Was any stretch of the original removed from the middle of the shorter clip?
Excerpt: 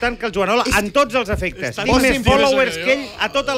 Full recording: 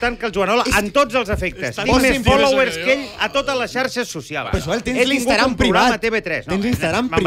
no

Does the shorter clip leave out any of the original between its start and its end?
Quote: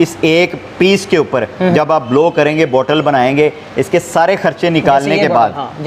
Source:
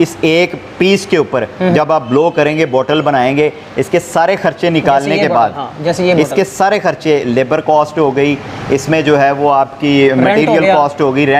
no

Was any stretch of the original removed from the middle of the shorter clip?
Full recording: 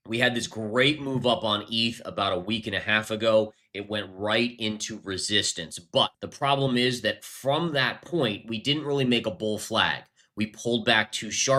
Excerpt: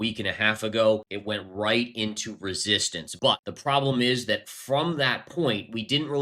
yes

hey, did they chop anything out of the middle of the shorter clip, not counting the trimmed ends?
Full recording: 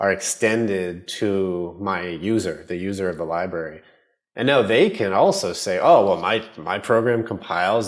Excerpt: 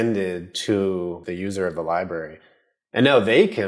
yes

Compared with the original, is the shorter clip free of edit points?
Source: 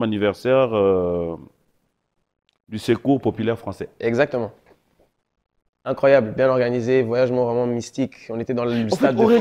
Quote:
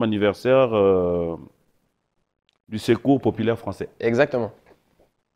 yes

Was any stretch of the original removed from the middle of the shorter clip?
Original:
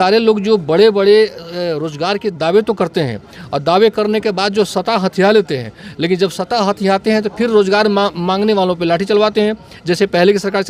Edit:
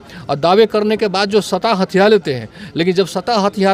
no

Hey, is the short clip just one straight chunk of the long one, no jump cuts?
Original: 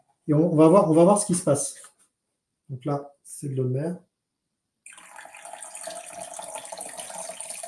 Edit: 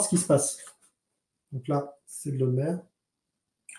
yes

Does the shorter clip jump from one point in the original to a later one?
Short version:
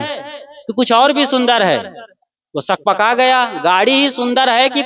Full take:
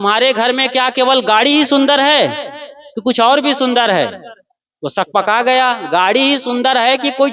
no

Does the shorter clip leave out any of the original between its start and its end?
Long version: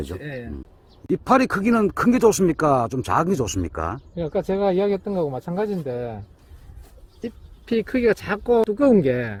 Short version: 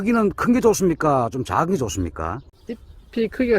yes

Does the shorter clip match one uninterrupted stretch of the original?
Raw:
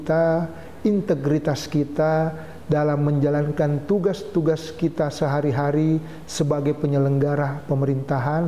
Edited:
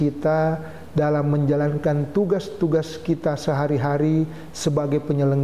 yes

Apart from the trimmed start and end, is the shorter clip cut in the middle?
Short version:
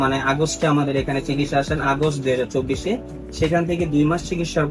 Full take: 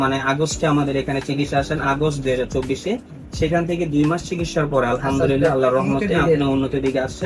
no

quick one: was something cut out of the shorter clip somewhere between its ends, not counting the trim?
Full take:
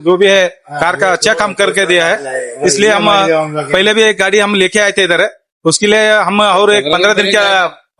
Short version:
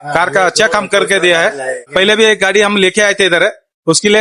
yes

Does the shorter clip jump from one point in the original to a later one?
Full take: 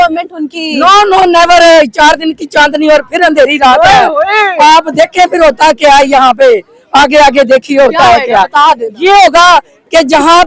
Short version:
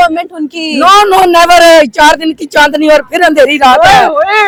no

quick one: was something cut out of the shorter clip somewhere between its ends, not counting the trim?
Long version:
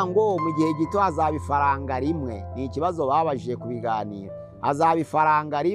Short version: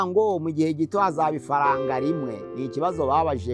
no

